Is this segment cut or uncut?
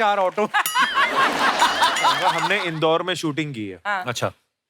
cut